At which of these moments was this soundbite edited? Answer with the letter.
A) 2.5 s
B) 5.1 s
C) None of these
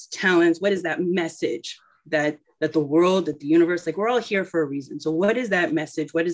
A